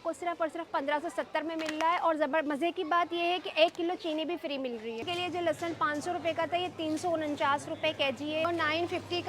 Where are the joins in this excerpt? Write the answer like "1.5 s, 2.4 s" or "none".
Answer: 5.1 s, 8.5 s